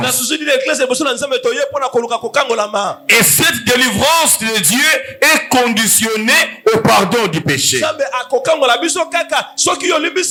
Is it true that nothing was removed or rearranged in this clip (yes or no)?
yes